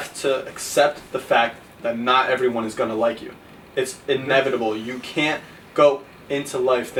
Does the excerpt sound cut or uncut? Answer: uncut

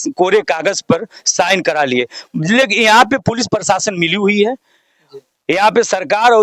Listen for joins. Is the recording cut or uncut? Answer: uncut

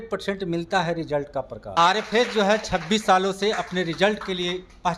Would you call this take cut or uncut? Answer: cut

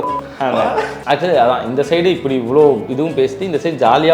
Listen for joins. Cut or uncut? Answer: cut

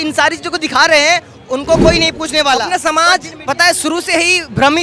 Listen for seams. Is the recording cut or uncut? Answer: cut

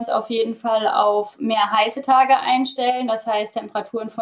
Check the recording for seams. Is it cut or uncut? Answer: uncut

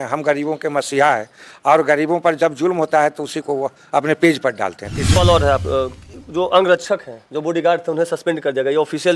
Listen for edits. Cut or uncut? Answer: cut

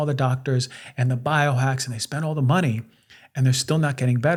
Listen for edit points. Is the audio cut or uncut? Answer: uncut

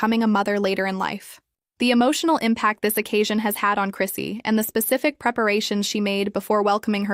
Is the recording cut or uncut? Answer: uncut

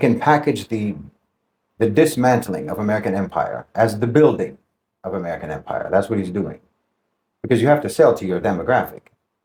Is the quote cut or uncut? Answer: uncut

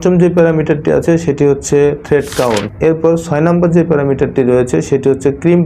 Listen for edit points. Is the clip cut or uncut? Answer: cut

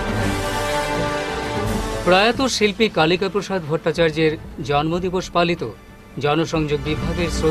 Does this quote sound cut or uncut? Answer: uncut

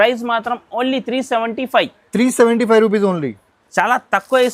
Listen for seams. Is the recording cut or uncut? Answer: cut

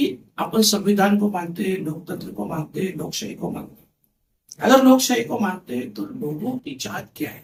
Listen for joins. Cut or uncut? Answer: uncut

